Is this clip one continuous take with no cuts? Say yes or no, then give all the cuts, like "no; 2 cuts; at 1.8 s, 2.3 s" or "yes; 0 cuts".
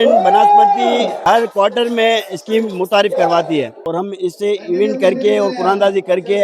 no; 2 cuts; at 1.2 s, 3.8 s